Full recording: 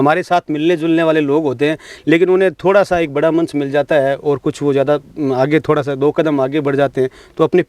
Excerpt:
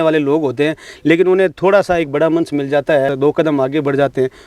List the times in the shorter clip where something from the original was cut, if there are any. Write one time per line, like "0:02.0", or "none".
0:03.1